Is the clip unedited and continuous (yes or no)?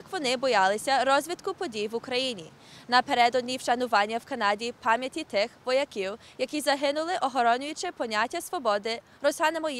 no